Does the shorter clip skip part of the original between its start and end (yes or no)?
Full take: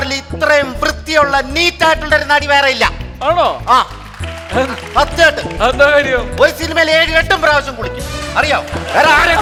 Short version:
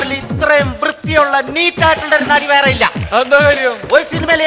yes